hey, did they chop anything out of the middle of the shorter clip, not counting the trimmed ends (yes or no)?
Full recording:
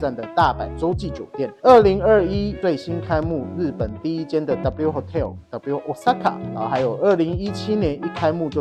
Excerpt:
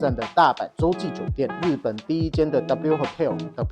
yes